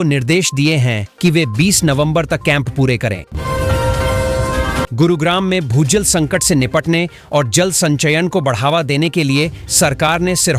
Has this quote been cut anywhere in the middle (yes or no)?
yes